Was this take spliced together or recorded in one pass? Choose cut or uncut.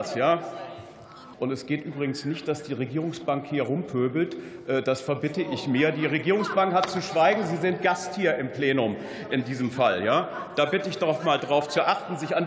cut